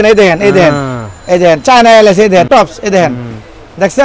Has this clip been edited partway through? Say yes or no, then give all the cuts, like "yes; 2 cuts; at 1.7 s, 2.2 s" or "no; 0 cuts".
yes; 1 cut; at 2.5 s